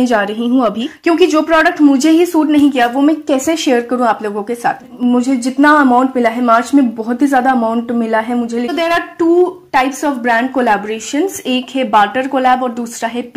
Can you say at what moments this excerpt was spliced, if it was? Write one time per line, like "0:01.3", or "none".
0:00.9
0:04.9
0:08.7